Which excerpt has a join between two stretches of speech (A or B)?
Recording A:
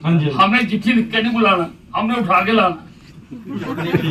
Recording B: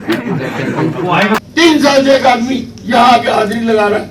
B